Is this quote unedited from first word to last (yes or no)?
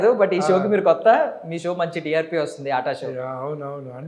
yes